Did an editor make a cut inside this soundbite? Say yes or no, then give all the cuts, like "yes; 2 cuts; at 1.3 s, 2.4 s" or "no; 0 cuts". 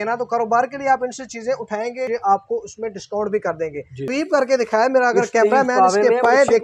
yes; 2 cuts; at 2.1 s, 4.0 s